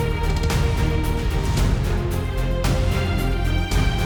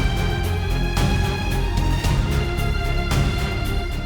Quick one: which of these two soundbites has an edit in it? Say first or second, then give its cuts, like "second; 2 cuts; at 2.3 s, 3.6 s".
second; 1 cut; at 2.2 s